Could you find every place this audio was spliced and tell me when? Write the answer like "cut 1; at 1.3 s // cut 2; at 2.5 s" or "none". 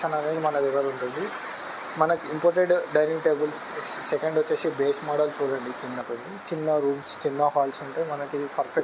cut 1; at 1.5 s // cut 2; at 6.1 s